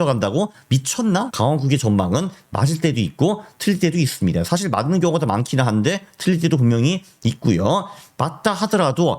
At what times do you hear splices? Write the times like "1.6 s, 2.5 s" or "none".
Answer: 1.3 s